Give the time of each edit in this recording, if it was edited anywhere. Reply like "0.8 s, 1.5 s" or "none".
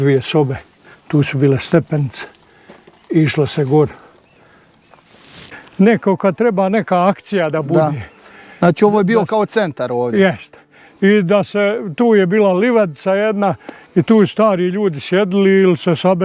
5.2 s